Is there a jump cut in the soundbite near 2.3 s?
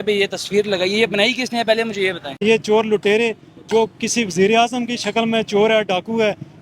yes; 1 cut; at 2.3 s

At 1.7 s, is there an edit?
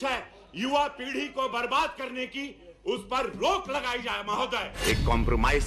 no; 1 cut; at 4.7 s

